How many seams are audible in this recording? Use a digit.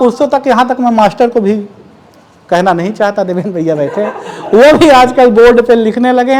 0